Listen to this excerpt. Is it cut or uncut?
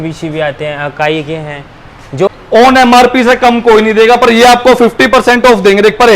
cut